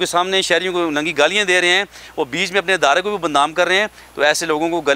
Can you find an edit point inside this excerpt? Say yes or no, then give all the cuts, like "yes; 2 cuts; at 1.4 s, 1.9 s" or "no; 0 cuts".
no; 0 cuts